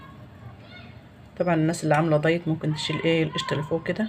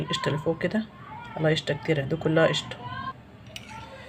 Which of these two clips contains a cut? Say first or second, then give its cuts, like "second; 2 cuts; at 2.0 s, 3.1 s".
second; 1 cut; at 3.1 s